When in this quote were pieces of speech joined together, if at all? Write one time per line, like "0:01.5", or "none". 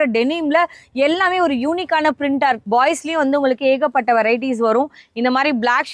0:02.6